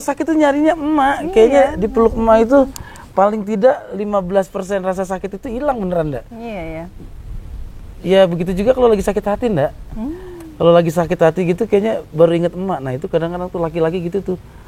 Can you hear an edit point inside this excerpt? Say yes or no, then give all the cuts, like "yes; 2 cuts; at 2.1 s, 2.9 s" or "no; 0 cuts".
no; 0 cuts